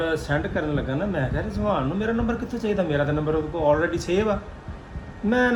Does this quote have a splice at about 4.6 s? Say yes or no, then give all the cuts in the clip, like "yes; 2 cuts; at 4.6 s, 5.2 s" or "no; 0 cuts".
no; 0 cuts